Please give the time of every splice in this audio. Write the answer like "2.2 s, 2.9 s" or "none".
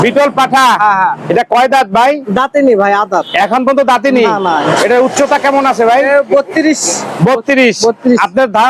none